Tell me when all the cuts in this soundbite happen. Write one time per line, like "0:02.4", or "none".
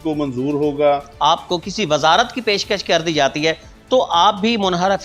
0:01.1